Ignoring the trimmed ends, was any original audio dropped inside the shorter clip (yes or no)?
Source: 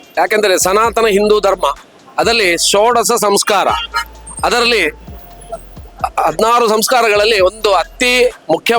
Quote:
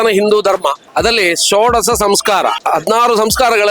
yes